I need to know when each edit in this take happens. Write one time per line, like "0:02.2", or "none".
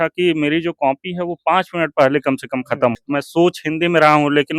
0:03.0